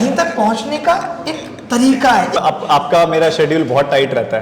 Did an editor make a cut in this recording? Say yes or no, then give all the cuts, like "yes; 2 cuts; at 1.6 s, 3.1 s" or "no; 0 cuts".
yes; 1 cut; at 2.4 s